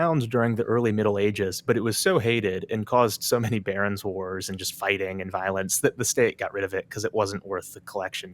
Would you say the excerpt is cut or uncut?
uncut